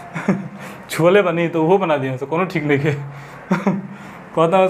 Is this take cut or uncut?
uncut